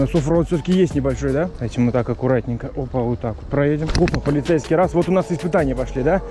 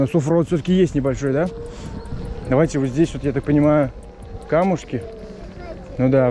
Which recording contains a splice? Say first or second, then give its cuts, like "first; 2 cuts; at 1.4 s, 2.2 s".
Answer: first; 2 cuts; at 1.6 s, 3.9 s